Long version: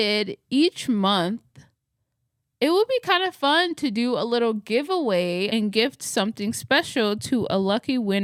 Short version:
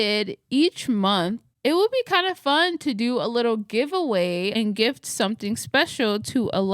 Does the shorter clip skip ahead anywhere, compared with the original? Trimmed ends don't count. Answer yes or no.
yes